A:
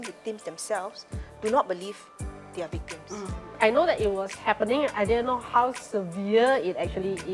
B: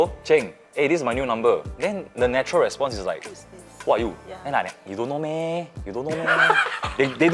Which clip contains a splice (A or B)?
A